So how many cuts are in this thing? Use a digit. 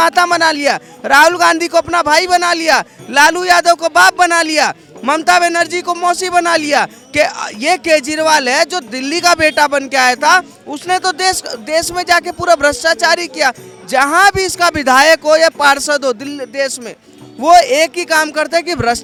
0